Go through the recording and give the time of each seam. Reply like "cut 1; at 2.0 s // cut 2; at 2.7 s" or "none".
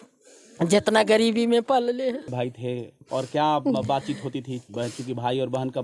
cut 1; at 2.3 s

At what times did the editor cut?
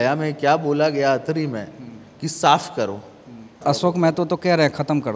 cut 1; at 3.5 s

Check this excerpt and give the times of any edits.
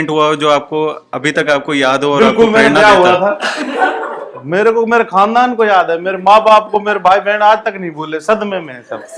none

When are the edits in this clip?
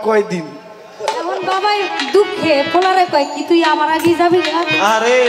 cut 1; at 1.4 s

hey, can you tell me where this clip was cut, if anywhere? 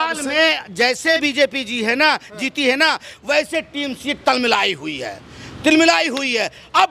cut 1; at 1.2 s

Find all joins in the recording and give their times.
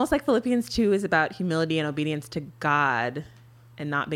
none

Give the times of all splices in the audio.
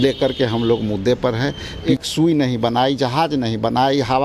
cut 1; at 2.0 s

